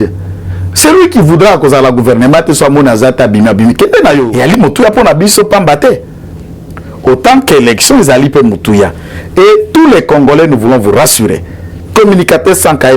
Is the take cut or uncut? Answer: cut